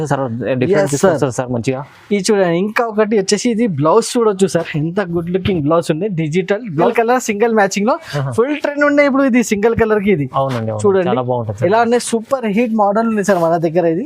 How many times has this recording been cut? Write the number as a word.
one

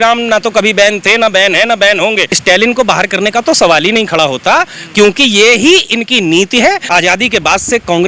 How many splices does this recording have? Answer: two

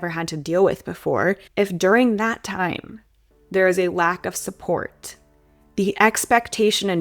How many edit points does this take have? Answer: one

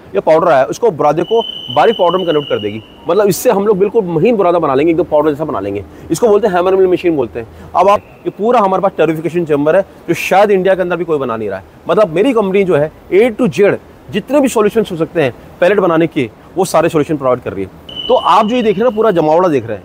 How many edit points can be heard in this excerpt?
two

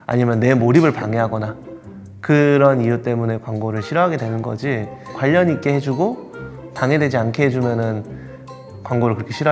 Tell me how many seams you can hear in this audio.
one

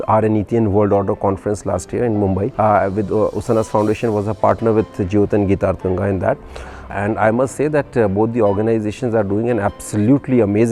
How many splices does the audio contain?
two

